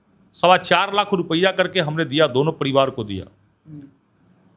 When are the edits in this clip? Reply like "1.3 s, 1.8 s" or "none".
none